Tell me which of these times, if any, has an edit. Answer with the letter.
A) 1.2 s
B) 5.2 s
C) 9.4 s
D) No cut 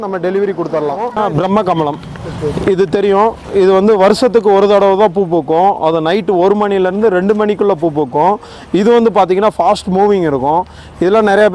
A